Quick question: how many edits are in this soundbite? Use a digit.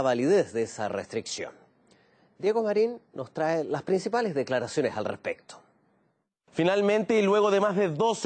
1